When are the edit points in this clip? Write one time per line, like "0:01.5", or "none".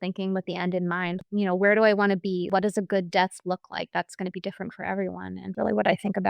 0:01.2
0:02.5
0:05.5